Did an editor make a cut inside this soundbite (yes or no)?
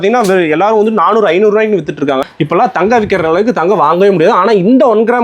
yes